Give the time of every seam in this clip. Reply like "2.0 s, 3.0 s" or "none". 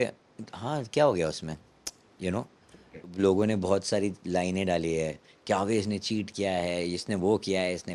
3.1 s